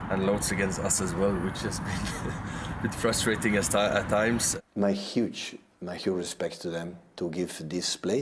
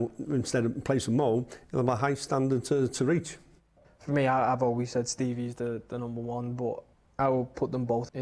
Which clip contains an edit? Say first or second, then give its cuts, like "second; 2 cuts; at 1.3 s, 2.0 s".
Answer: first; 1 cut; at 4.5 s